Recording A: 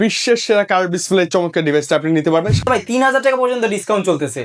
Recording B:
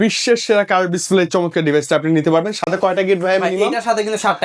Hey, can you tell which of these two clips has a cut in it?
A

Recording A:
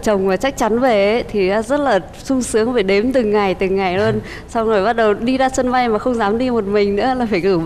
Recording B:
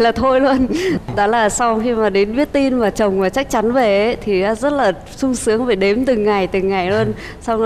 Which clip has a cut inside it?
B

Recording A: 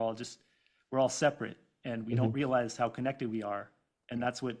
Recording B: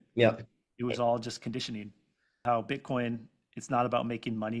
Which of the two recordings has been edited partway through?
B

